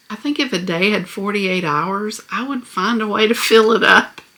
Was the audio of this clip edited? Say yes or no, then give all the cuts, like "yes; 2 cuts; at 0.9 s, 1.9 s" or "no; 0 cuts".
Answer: no; 0 cuts